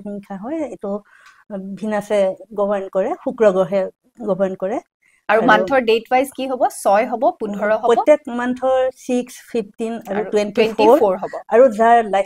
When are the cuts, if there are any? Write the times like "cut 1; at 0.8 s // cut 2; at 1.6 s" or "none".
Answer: none